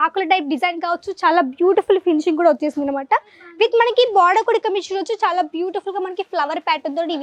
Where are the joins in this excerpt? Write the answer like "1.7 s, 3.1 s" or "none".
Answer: none